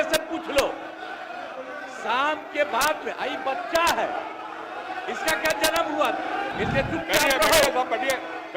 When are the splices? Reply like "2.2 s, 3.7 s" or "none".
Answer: 6.5 s